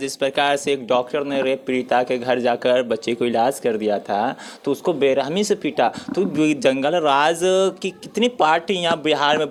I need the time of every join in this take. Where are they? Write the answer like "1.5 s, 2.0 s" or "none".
none